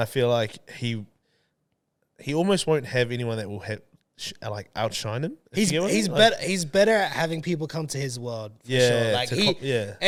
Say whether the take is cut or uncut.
uncut